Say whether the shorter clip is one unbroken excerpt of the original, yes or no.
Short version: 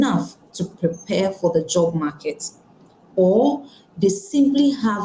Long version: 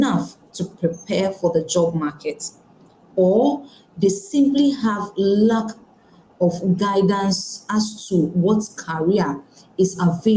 yes